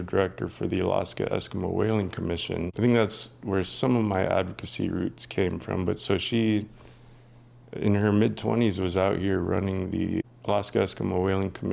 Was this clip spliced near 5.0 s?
no; 2 cuts; at 2.7 s, 10.3 s

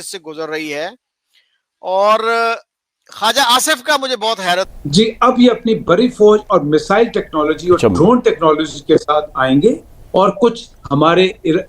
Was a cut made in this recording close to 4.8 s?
yes; 1 cut; at 4.8 s

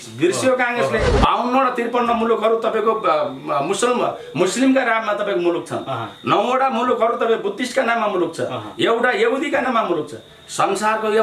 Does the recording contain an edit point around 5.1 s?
no; 1 cut; at 1.1 s

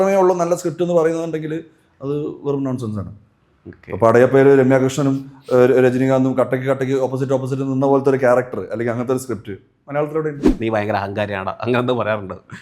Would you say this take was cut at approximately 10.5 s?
yes; 1 cut; at 10.5 s

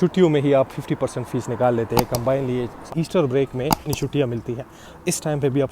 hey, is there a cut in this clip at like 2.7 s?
yes; 2 cuts; at 2.7 s, 3.8 s

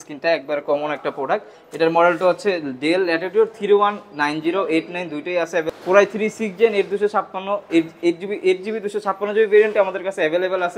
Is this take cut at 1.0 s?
no; 1 cut; at 5.7 s

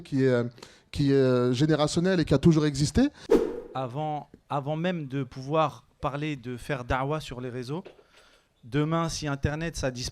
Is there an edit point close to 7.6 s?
no; 1 cut; at 3.2 s

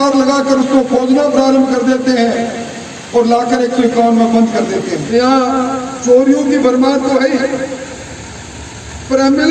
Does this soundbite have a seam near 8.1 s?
no; 1 cut; at 5.0 s

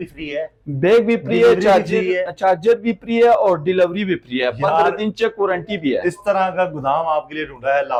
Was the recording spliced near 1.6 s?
no; 0 cuts

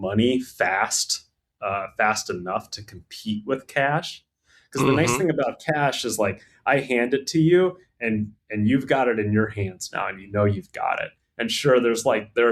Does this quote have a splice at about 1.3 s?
no; 0 cuts

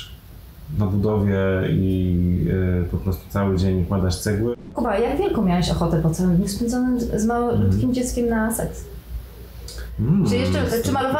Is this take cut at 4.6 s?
yes; 1 cut; at 4.6 s

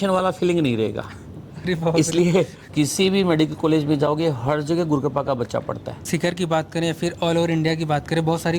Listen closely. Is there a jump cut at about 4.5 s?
no; 2 cuts; at 2.6 s, 6.0 s

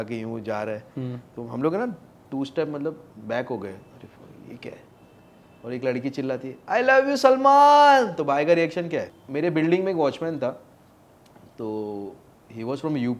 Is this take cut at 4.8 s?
no; 1 cut; at 9.2 s

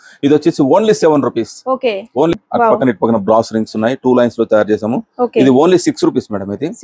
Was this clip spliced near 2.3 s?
yes; 1 cut; at 2.3 s

